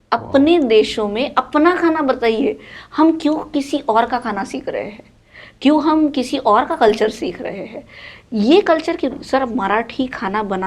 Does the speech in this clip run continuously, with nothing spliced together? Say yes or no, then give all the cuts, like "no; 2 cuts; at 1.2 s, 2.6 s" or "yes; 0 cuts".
yes; 0 cuts